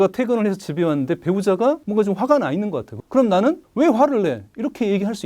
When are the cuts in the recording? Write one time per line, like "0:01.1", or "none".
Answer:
0:01.8
0:02.9
0:03.6